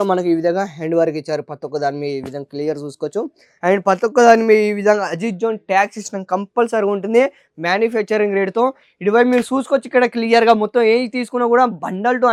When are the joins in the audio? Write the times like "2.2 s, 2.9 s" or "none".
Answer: none